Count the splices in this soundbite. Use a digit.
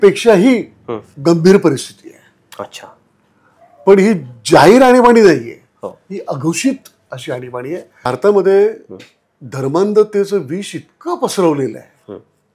1